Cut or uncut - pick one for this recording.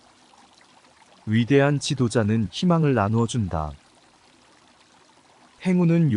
cut